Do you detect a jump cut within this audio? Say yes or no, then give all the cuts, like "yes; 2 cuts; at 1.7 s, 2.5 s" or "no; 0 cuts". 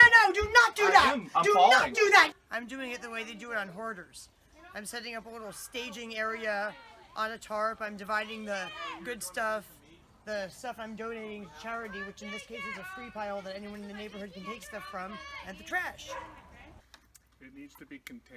yes; 2 cuts; at 2.4 s, 16.7 s